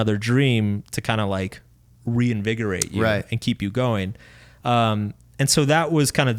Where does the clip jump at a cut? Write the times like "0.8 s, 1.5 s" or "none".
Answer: none